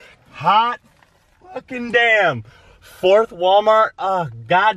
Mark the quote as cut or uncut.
uncut